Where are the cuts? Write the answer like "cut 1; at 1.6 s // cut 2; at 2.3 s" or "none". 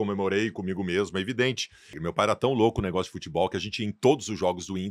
cut 1; at 2.0 s